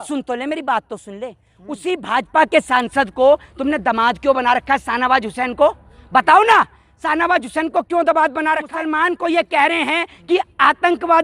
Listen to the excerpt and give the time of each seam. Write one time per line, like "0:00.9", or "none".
0:08.7